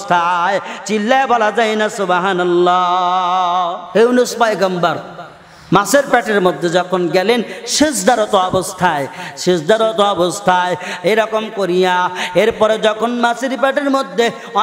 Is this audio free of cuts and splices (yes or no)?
no